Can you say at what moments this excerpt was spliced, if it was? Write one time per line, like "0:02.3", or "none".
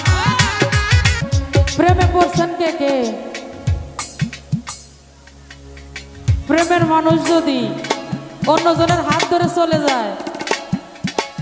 0:01.1